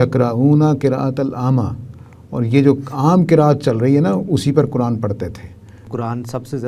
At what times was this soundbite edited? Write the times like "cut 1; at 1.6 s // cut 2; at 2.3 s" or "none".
cut 1; at 5.8 s